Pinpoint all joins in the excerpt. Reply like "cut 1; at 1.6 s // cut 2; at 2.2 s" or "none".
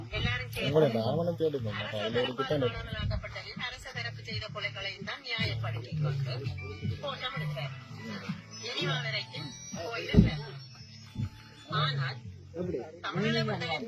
none